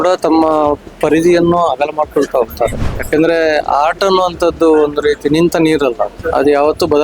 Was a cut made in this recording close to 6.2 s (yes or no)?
yes